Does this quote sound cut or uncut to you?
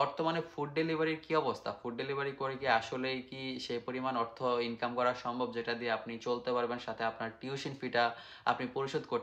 uncut